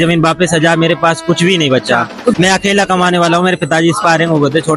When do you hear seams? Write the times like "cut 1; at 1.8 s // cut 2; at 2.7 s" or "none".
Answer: cut 1; at 2.4 s